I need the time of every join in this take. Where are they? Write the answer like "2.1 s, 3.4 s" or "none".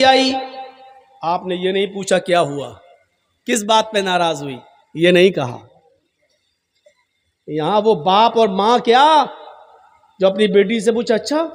none

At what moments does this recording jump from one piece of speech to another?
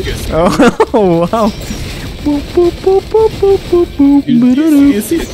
4.3 s

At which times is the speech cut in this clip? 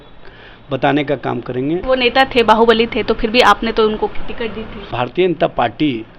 1.8 s, 4.9 s

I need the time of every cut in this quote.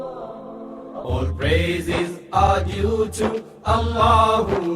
1.0 s

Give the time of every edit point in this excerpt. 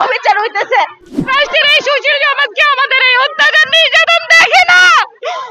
1.1 s

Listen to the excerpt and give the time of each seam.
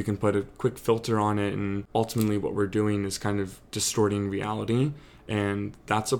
1.8 s

